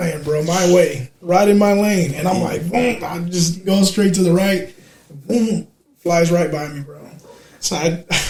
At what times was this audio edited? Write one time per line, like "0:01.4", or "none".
none